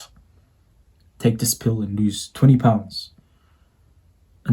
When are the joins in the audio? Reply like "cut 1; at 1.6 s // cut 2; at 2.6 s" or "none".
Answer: none